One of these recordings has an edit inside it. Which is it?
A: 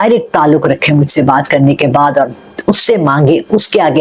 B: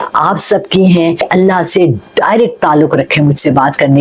B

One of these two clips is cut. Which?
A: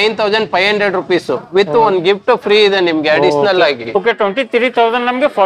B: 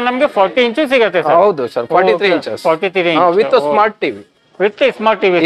A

